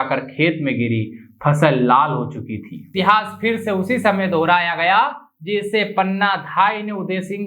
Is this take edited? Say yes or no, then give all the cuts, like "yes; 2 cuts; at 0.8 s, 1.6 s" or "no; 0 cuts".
yes; 1 cut; at 2.9 s